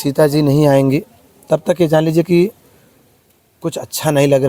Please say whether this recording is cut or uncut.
uncut